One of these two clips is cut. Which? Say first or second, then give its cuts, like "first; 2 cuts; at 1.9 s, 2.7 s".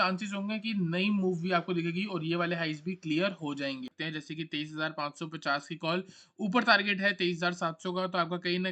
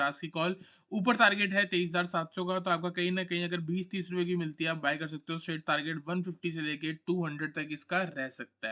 first; 1 cut; at 3.9 s